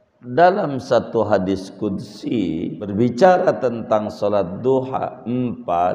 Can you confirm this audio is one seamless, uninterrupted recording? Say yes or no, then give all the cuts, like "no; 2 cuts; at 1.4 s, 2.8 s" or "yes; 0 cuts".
no; 1 cut; at 2.9 s